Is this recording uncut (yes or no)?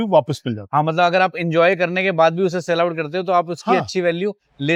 yes